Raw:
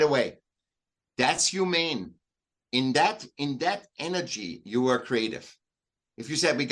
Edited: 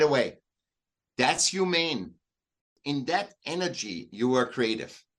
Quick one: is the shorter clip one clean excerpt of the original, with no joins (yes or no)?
no